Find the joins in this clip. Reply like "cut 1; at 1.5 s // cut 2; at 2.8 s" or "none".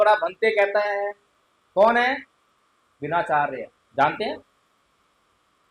none